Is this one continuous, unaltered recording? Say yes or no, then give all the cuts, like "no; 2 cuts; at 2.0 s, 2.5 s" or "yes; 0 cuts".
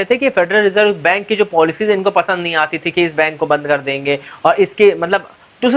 yes; 0 cuts